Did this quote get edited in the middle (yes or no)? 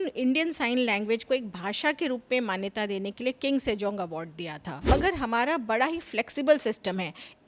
yes